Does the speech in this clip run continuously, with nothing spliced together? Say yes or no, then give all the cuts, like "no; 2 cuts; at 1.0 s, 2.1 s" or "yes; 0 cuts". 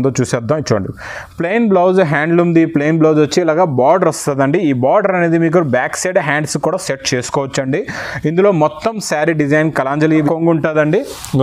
no; 1 cut; at 10.3 s